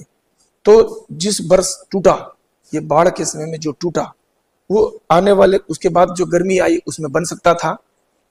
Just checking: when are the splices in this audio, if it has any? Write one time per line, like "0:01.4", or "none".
none